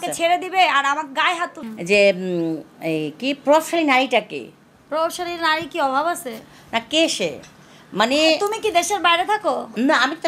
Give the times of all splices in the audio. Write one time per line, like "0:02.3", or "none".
0:01.6